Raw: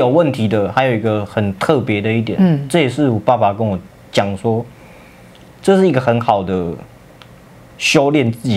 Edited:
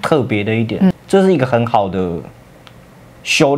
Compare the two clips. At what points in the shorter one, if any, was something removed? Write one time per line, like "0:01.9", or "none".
0:00.9

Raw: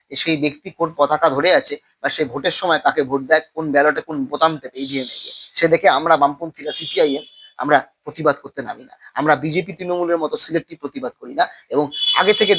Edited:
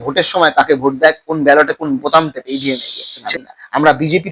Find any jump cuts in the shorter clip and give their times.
0:03.1

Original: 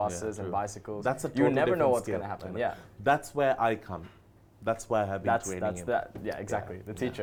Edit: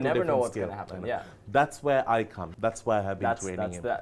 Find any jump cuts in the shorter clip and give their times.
0:02.4

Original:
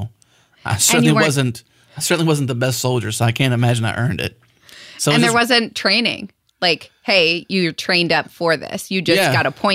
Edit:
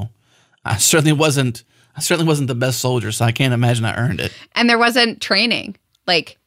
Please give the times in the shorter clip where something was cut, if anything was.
0:04.6

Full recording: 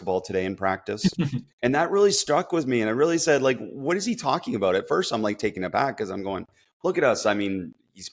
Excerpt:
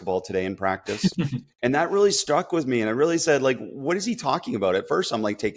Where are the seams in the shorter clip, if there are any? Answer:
none

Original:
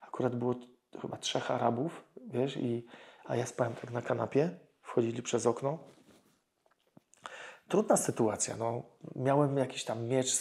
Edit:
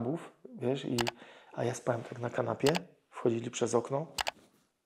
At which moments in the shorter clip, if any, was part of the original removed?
none

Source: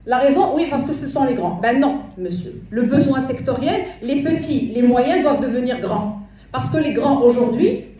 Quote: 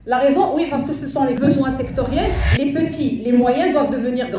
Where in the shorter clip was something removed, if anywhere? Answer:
0:01.4

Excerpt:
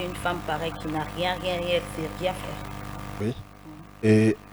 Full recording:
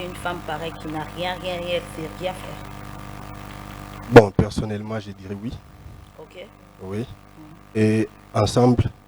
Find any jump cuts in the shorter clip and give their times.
0:03.2

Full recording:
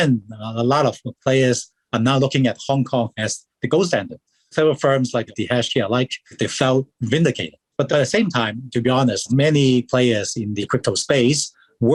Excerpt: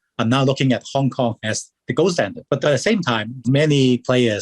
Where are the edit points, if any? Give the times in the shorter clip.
0:02.4
0:03.4

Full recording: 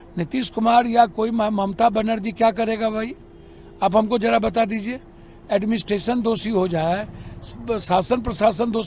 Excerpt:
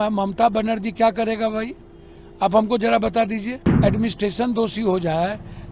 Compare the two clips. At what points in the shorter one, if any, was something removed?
0:03.6

